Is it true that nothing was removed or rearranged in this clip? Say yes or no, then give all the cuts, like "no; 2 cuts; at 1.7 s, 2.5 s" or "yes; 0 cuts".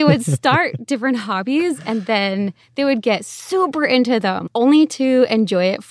no; 1 cut; at 4.4 s